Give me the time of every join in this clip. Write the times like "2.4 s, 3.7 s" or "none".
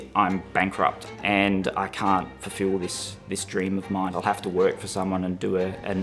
1.1 s, 4.1 s